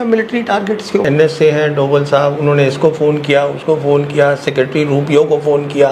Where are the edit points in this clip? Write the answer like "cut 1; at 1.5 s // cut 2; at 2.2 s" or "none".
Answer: cut 1; at 1.0 s